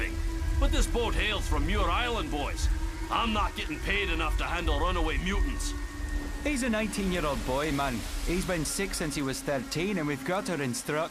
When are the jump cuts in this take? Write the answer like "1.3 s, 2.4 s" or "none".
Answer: 7.2 s

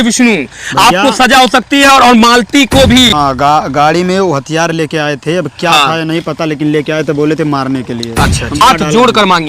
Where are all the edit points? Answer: 3.1 s, 8.6 s

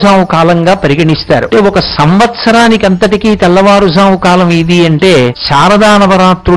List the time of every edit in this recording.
1.5 s, 5.4 s

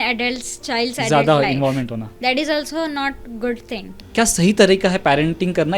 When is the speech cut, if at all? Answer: 2.1 s, 4.0 s

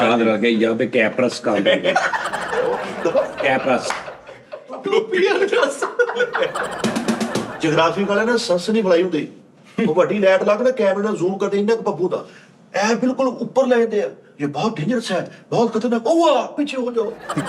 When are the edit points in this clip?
7.5 s

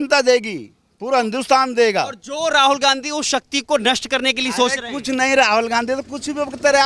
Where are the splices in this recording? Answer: none

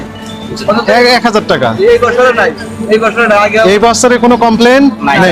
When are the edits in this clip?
none

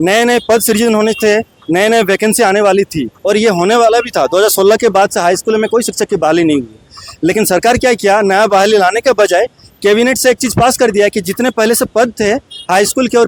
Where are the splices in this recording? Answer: none

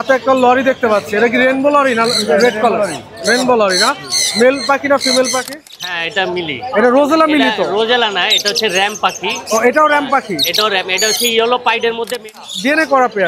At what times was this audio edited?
5.7 s, 12.3 s

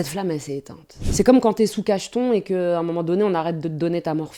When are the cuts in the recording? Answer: none

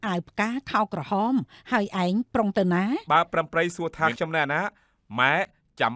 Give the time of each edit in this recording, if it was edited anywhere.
3.0 s

